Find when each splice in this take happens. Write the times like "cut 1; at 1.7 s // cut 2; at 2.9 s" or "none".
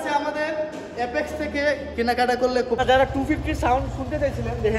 cut 1; at 2.8 s